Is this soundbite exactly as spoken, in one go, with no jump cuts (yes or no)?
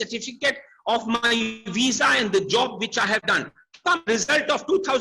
yes